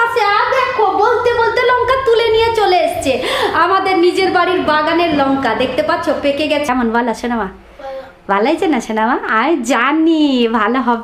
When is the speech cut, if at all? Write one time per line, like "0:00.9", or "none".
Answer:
0:06.7